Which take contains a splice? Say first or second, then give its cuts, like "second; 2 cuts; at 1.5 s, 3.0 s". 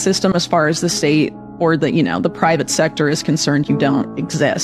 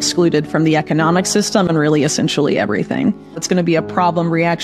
second; 1 cut; at 3.4 s